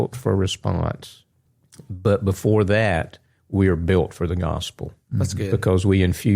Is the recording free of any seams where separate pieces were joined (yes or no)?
yes